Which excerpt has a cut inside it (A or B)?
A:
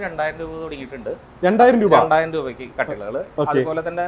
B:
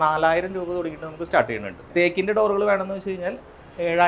B